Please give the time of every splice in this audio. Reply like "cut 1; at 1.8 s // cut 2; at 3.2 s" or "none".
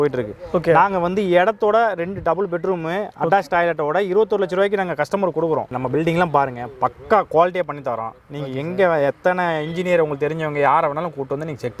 cut 1; at 5.7 s

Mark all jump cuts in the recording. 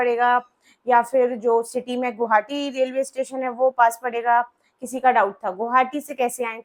none

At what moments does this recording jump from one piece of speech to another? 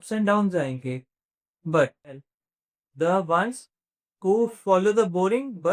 cut 1; at 2.3 s

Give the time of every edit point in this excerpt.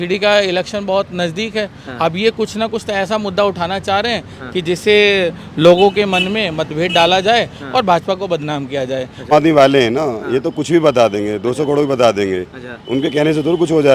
cut 1; at 9.3 s

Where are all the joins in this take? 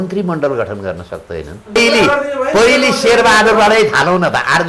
cut 1; at 1.8 s

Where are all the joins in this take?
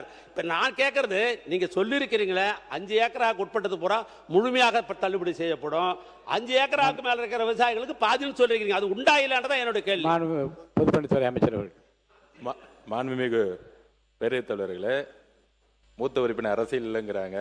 none

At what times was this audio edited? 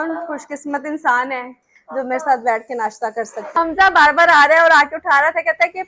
cut 1; at 3.5 s

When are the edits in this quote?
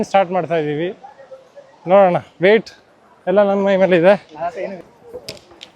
cut 1; at 4.7 s

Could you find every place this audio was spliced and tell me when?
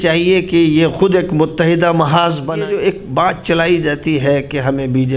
cut 1; at 2.5 s

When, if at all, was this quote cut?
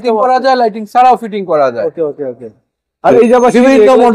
none

